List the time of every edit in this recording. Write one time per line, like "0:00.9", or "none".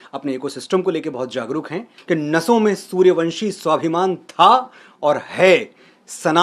0:01.9